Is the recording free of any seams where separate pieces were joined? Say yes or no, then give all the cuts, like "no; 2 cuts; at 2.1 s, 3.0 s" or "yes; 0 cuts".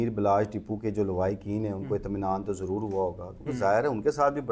yes; 0 cuts